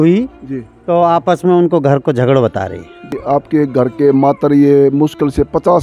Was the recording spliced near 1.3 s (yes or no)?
no